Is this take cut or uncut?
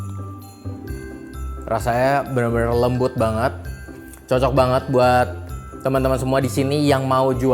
cut